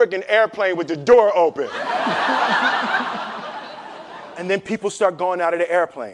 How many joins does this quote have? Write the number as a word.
one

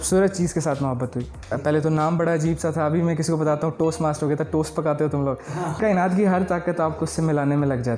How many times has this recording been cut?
two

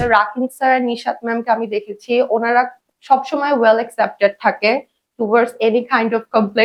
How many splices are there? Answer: zero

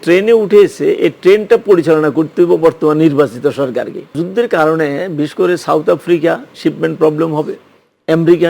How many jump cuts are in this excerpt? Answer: one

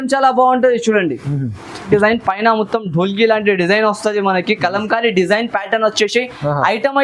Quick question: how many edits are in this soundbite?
one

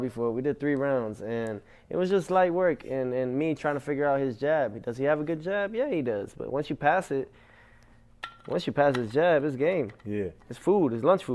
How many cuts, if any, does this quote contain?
zero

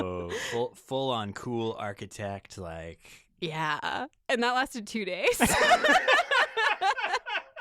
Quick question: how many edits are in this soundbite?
one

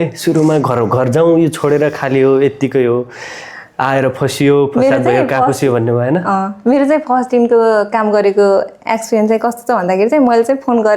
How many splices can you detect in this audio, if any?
zero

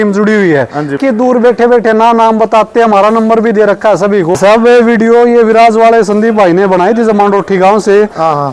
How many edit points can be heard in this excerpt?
two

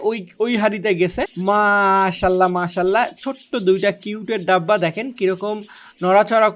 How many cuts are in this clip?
one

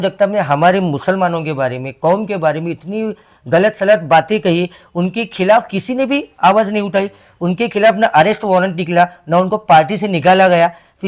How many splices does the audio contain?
zero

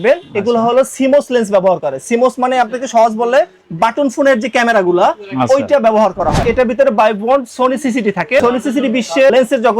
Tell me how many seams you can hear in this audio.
two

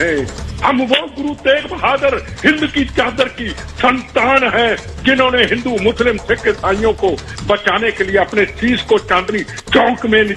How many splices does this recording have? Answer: zero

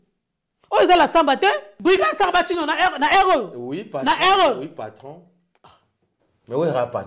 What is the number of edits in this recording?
one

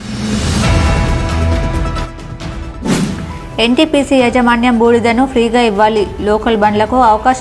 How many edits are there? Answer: two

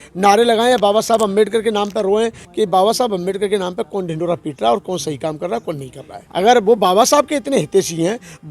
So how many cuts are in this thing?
two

